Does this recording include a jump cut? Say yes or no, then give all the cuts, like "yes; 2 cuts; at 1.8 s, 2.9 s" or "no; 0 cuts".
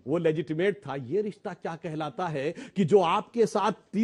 no; 0 cuts